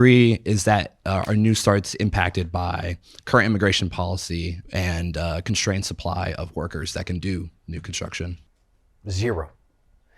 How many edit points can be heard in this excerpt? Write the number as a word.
two